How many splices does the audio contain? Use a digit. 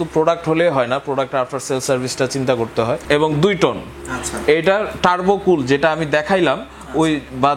1